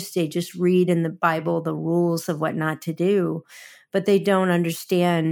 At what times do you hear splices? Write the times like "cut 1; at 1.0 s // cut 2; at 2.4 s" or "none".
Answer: cut 1; at 1.1 s